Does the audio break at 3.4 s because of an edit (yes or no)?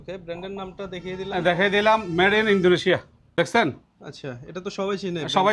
yes